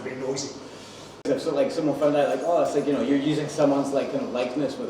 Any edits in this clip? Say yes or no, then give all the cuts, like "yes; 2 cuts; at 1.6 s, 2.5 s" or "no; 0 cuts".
yes; 1 cut; at 1.2 s